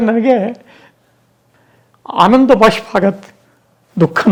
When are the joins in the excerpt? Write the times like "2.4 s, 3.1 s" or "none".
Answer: none

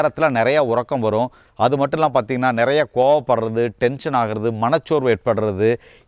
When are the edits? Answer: 1.4 s

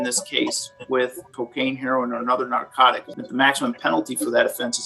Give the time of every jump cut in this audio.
1.3 s, 3.1 s

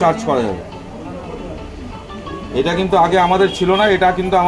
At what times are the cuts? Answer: none

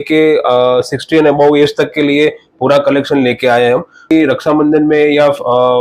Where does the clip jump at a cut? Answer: 4.1 s

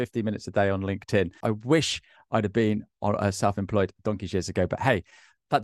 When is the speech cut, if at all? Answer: 1.4 s

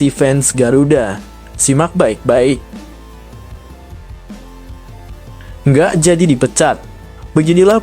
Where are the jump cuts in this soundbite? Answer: 2.8 s, 5.6 s

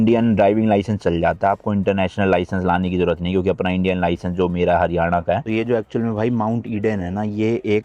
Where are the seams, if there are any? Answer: 5.4 s

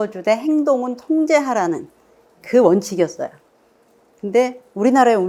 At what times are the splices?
none

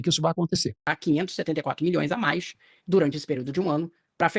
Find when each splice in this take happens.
0.9 s

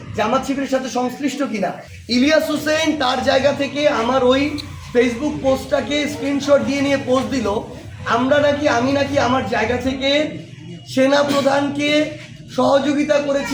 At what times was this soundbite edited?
1.9 s

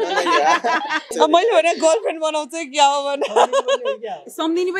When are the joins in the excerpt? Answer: 1.1 s

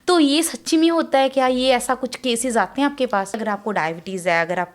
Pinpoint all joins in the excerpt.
3.4 s

